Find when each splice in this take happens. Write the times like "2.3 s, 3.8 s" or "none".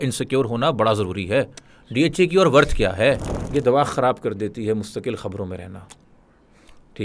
3.3 s

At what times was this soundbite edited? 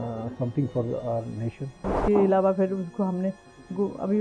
1.9 s

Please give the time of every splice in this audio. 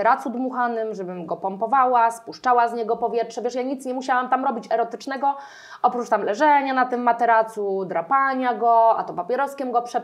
none

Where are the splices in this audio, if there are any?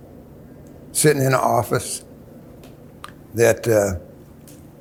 none

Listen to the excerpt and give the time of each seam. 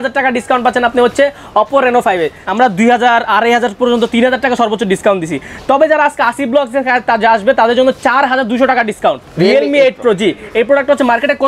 2.4 s, 9.3 s

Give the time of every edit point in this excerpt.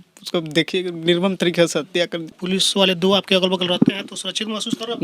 2.3 s

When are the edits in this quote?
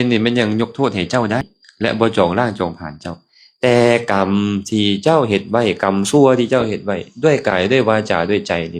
1.6 s

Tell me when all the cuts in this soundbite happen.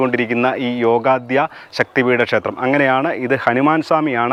none

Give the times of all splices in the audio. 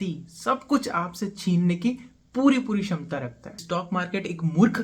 3.4 s

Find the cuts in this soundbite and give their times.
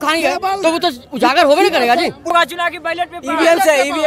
2.3 s

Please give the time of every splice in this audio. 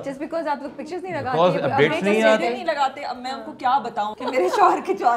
4.2 s

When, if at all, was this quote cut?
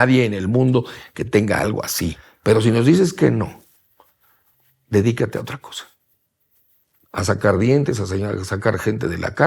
2.3 s

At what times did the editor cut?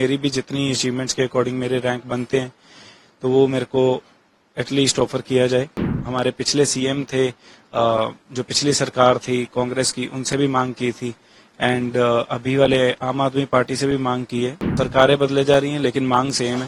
5.8 s, 14.6 s

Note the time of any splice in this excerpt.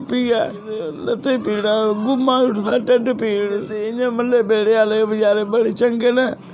0.9 s, 3.8 s

